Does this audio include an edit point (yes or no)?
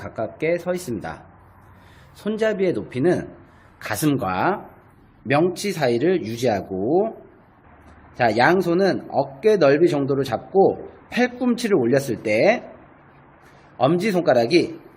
no